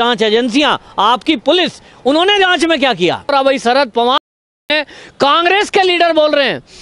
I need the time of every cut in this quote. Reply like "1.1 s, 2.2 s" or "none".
3.3 s